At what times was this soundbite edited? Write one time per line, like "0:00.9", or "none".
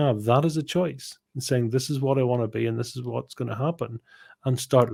none

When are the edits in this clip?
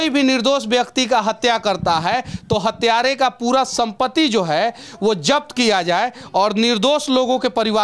none

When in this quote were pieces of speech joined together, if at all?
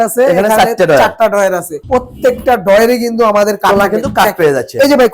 none

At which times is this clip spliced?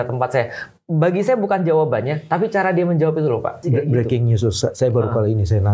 0:03.6

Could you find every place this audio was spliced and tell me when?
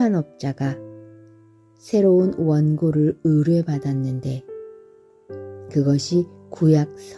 none

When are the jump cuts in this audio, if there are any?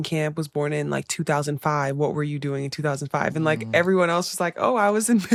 none

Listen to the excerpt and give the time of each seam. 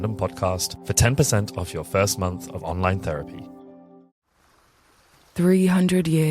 0:04.1

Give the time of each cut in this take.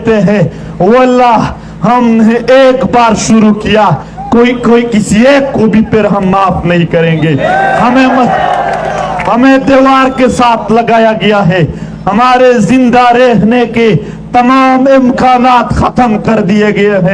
none

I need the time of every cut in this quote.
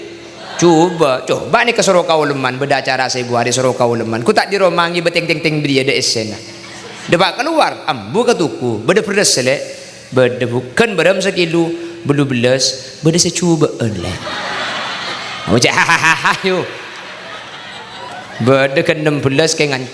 0:18.1

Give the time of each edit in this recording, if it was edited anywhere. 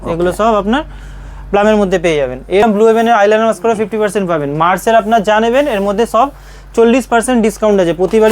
0:02.6

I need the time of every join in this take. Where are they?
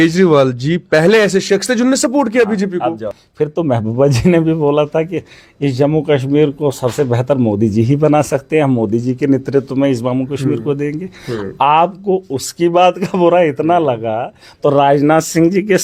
none

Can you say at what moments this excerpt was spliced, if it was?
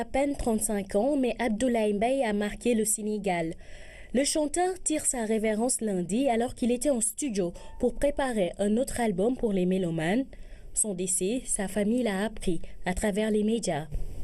none

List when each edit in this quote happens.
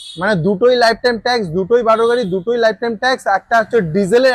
none

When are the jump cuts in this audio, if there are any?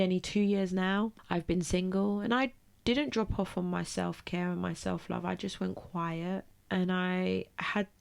0:01.2
0:06.5

